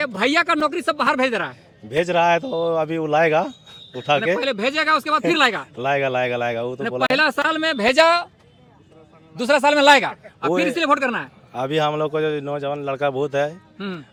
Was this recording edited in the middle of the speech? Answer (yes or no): no